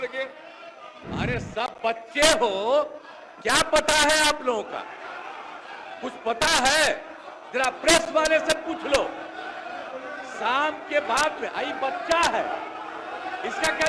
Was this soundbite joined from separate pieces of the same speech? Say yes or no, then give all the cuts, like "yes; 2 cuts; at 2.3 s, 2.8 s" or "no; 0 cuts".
yes; 1 cut; at 0.9 s